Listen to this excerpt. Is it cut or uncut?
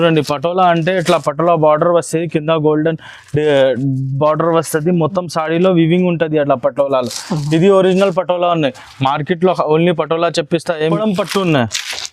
cut